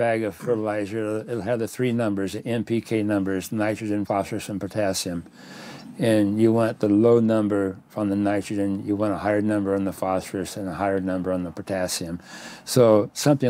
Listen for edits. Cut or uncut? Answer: cut